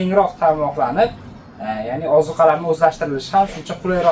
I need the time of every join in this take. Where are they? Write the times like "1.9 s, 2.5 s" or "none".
none